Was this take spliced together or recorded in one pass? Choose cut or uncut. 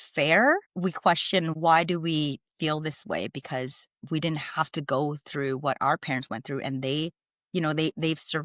cut